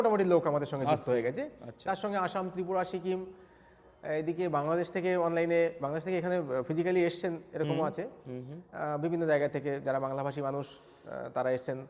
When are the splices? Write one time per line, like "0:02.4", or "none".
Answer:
none